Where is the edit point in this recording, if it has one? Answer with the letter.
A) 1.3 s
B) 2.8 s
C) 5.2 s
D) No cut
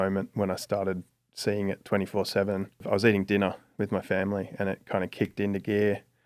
B